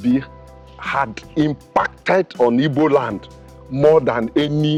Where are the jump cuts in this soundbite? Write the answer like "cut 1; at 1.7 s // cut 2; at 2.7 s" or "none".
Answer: none